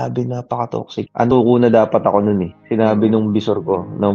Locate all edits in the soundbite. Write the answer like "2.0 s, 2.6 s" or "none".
1.3 s